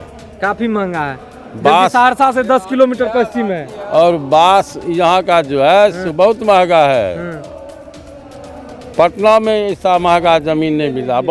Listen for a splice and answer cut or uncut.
uncut